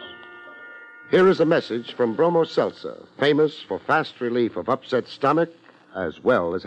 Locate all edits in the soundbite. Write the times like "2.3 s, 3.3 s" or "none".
none